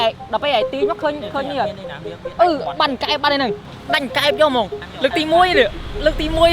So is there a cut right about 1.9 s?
no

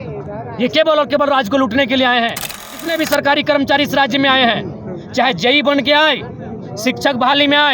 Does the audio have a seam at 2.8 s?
yes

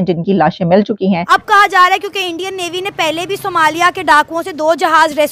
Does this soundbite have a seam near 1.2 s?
yes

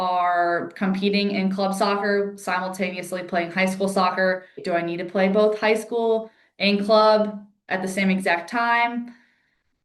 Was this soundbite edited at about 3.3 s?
no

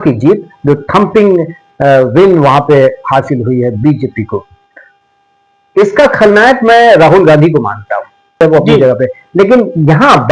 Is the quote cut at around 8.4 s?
yes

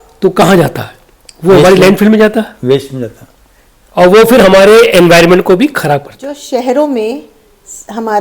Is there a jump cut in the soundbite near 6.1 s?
yes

